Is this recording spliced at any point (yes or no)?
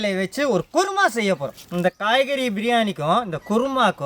no